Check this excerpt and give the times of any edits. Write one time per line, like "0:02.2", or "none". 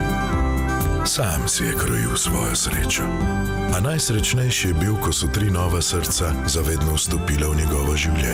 none